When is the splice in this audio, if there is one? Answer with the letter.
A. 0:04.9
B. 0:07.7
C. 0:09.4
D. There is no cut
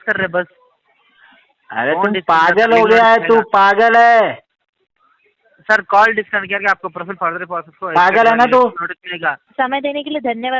C